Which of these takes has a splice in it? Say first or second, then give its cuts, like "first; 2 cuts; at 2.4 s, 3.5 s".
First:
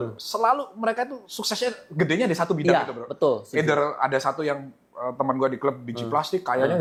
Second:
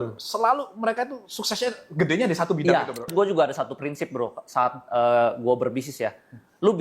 second; 1 cut; at 3.1 s